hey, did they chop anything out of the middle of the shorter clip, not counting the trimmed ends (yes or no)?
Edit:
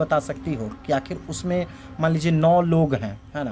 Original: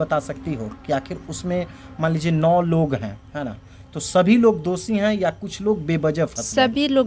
no